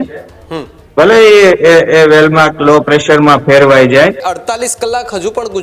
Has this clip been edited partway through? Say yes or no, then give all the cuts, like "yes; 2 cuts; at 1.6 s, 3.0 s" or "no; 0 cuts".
yes; 1 cut; at 4.2 s